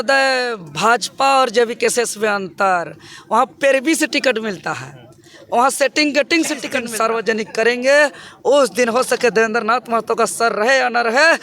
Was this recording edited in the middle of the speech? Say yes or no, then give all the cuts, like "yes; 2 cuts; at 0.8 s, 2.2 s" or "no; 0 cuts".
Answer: yes; 1 cut; at 6.8 s